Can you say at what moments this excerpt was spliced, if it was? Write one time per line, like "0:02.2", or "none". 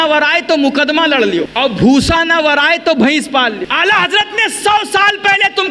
0:01.5
0:03.7